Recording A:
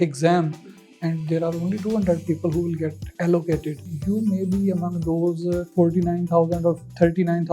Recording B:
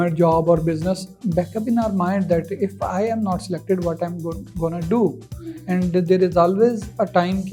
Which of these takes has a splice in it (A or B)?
A